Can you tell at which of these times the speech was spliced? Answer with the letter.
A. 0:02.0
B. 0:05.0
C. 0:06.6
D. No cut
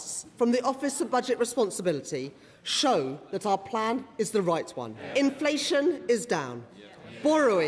B